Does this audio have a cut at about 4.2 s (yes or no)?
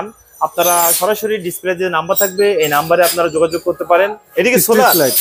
yes